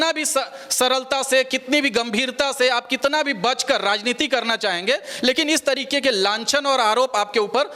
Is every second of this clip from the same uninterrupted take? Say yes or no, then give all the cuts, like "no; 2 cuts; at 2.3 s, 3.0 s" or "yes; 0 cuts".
yes; 0 cuts